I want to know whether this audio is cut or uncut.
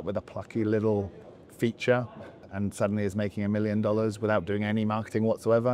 cut